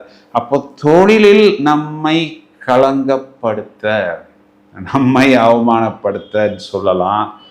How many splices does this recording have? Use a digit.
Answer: 0